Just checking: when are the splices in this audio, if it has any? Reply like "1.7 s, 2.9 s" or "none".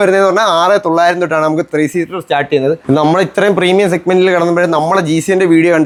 none